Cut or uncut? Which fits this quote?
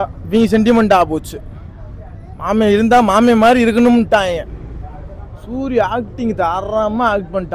uncut